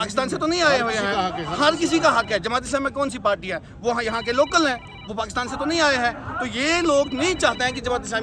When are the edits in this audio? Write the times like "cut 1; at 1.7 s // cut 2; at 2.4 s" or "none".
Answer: none